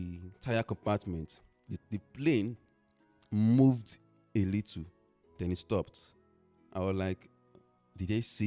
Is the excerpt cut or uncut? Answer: uncut